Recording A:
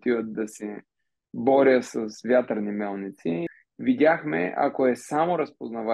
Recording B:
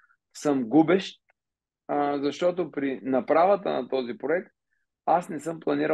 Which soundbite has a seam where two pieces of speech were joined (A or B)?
A